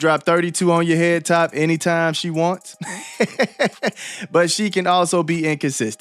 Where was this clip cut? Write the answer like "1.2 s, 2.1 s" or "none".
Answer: none